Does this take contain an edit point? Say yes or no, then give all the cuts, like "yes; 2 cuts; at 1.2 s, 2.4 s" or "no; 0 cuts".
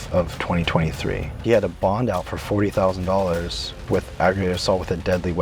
yes; 2 cuts; at 1.3 s, 3.8 s